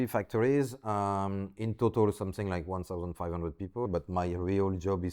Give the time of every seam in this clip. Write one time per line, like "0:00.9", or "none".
0:03.9